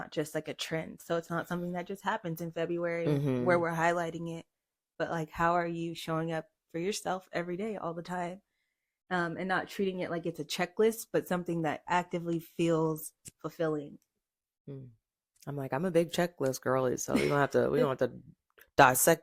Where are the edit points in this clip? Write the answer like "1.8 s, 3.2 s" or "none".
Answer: none